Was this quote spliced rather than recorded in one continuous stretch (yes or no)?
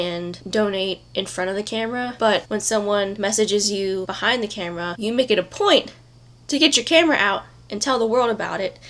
no